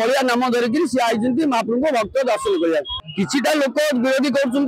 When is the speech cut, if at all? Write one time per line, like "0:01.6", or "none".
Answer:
0:03.0